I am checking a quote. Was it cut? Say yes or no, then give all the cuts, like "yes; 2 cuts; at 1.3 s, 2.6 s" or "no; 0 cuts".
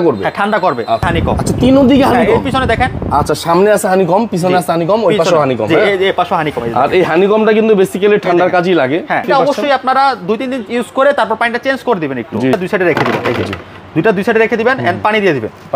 yes; 3 cuts; at 1.1 s, 9.2 s, 12.5 s